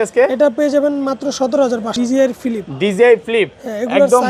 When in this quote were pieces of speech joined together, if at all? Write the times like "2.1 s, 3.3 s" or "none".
1.9 s